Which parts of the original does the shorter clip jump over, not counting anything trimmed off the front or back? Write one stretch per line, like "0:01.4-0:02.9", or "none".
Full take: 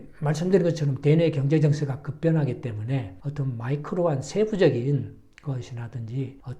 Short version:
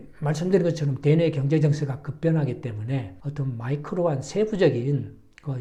none